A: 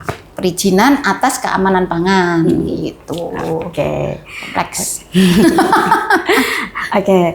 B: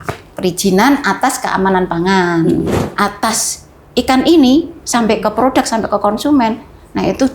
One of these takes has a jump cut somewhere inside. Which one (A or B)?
B